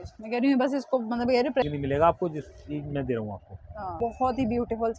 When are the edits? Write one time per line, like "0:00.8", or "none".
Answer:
0:01.7
0:04.0